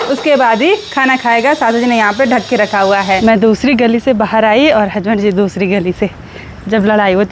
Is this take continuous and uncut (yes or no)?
no